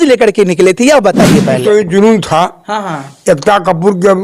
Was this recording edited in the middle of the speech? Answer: yes; 1 cut; at 1.5 s

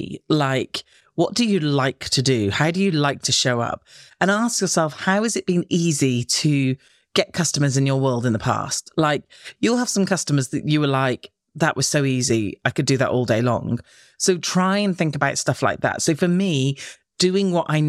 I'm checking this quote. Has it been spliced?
no; 0 cuts

